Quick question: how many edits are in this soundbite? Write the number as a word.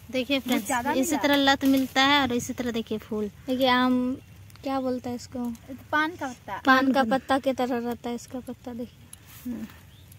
zero